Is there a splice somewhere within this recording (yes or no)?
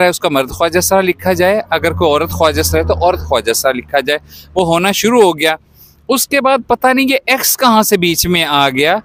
no